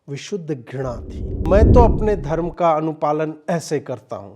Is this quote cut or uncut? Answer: cut